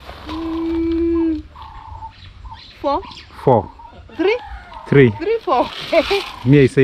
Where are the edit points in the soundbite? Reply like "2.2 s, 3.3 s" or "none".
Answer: none